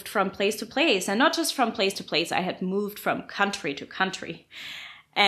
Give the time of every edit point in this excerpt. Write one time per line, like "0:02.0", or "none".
none